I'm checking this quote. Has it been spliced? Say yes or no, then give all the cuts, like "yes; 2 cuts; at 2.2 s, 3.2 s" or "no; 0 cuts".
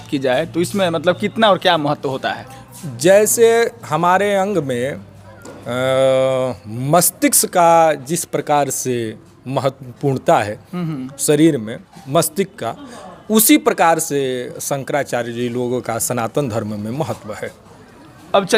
no; 0 cuts